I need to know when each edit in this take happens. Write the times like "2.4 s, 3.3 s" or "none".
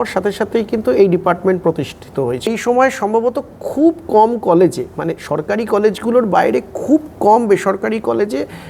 2.5 s

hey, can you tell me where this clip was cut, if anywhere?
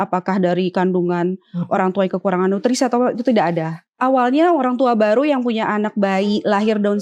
3.9 s

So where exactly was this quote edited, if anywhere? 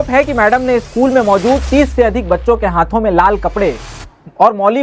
none

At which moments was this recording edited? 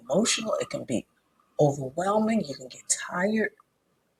none

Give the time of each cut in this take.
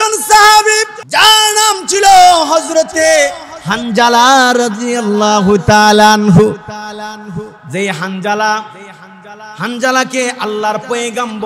0.9 s

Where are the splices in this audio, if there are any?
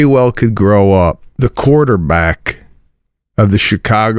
1.3 s

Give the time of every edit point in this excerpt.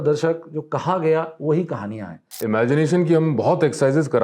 2.4 s

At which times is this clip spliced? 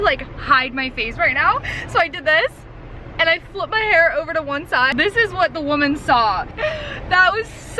4.9 s, 6.5 s

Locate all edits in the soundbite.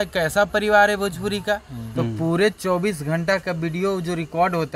1.8 s

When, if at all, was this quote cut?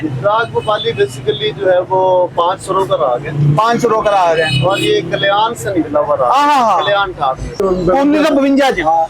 7.6 s

